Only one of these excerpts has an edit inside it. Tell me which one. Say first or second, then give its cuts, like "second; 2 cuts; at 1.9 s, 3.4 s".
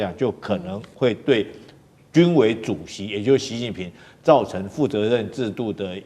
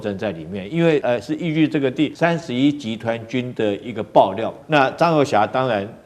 second; 3 cuts; at 1.0 s, 2.1 s, 4.5 s